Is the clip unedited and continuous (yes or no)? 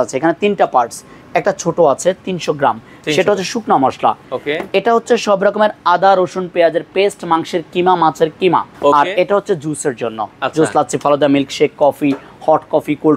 no